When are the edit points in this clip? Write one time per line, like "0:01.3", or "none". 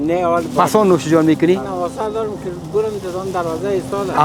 0:01.7